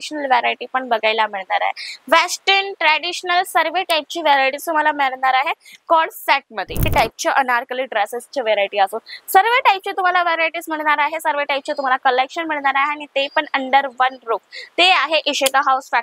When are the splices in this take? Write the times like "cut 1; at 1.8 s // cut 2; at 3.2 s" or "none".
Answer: cut 1; at 6.9 s